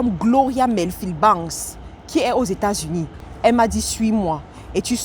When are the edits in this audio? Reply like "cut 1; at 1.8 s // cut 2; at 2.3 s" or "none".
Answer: cut 1; at 3.2 s